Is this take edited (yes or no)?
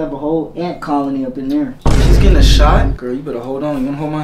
yes